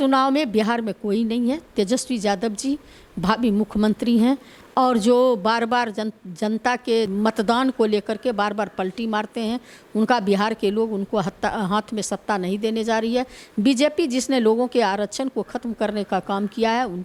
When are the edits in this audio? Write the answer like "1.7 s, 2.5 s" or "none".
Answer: none